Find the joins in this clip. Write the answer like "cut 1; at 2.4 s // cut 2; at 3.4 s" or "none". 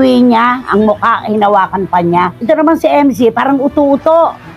cut 1; at 2.4 s